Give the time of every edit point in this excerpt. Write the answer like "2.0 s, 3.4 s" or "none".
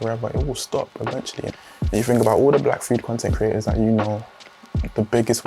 1.4 s